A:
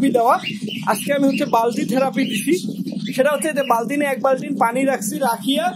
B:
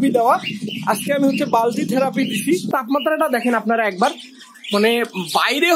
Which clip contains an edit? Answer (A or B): B